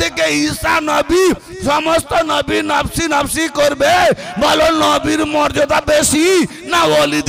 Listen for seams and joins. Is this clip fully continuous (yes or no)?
yes